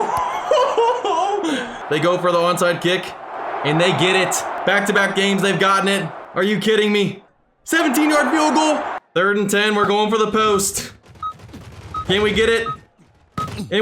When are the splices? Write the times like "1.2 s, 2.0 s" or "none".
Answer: 1.8 s, 4.5 s, 6.2 s, 7.3 s, 9.0 s